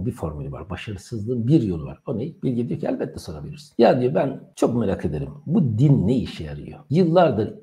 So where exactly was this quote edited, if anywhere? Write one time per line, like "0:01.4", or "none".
0:02.3